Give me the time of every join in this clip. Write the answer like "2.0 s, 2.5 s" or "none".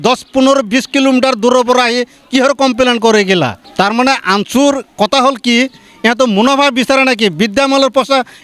3.6 s